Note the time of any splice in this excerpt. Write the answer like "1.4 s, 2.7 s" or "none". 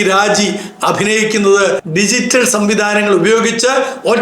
1.8 s